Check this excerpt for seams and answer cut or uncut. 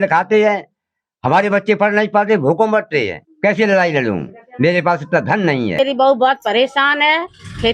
cut